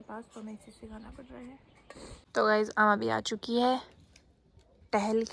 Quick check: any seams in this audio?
yes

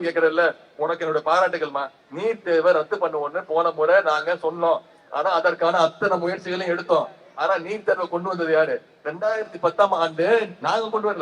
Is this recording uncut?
yes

